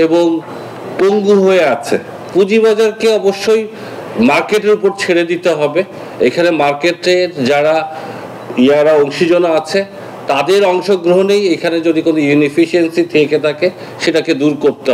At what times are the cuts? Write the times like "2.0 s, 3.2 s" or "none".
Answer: 2.2 s